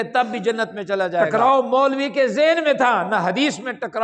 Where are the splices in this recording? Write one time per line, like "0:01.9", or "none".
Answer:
0:01.3